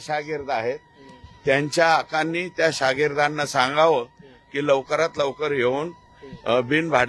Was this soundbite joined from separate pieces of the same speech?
no; 0 cuts

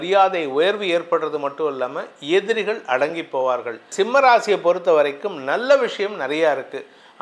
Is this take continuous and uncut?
no; 1 cut; at 3.9 s

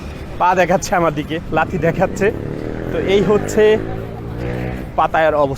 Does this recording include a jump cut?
no; 0 cuts

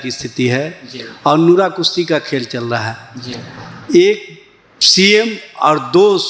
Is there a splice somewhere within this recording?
no; 0 cuts

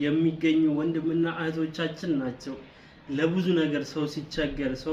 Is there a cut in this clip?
no; 0 cuts

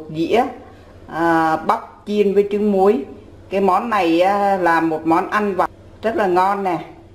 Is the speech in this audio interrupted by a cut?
yes; 1 cut; at 5.8 s

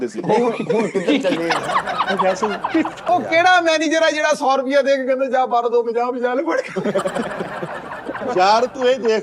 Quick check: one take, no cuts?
no; 1 cut; at 3.1 s

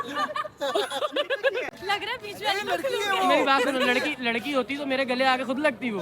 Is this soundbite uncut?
no; 1 cut; at 1.8 s

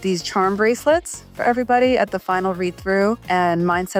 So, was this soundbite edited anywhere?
no; 0 cuts

